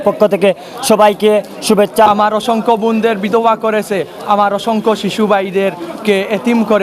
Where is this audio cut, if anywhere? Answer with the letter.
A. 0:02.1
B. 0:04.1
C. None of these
A